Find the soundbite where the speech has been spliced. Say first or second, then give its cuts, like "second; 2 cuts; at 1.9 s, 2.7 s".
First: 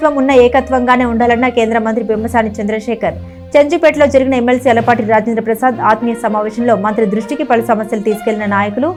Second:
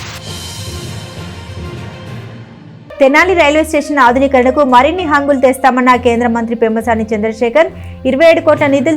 second; 1 cut; at 2.4 s